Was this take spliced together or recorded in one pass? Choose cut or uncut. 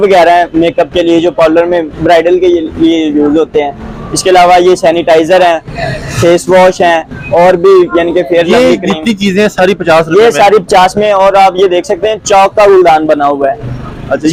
uncut